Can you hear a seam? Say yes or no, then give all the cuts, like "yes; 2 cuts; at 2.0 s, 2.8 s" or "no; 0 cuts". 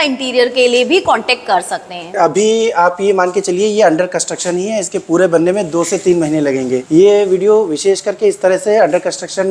yes; 2 cuts; at 2.1 s, 6.8 s